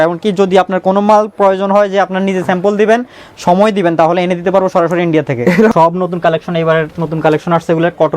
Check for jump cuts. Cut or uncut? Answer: cut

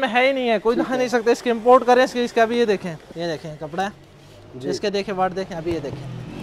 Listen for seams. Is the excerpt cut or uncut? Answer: uncut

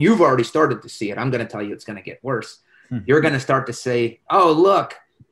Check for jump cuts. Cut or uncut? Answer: uncut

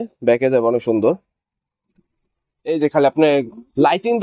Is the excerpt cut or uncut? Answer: cut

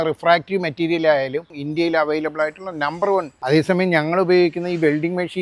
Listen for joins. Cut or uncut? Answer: cut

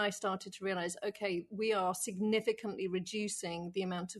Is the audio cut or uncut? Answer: uncut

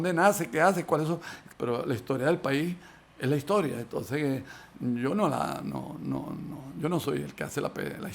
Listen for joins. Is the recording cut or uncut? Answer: cut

